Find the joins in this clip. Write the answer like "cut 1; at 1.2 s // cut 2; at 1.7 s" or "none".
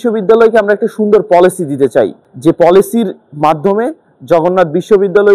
cut 1; at 2.2 s